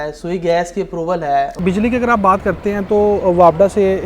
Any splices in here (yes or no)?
yes